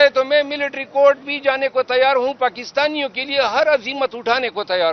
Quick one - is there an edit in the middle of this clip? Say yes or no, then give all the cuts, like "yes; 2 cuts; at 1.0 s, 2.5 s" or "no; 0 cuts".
no; 0 cuts